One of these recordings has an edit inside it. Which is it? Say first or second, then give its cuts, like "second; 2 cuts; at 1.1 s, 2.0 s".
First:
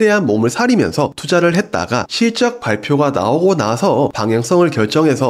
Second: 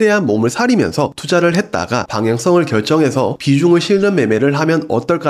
second; 1 cut; at 2.1 s